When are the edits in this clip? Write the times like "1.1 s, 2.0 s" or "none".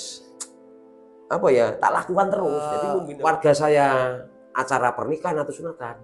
3.0 s